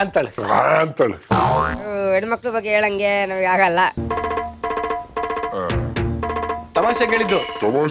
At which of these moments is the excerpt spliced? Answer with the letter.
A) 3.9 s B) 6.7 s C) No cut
A